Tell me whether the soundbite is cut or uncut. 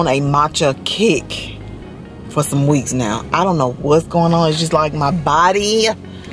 uncut